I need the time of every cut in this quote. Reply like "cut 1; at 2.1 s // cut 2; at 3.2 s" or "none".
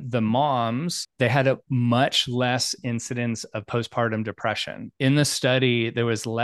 cut 1; at 1.1 s